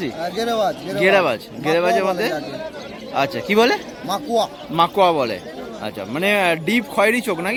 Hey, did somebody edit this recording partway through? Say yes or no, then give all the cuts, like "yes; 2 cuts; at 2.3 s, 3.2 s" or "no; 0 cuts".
no; 0 cuts